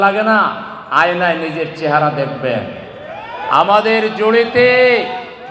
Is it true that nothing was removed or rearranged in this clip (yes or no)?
yes